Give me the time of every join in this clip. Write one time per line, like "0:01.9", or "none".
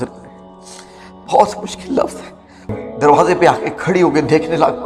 0:02.8